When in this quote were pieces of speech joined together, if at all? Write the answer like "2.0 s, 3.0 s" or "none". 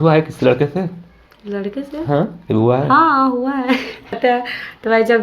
4.2 s